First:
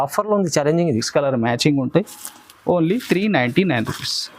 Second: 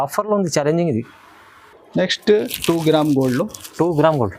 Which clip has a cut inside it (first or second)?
first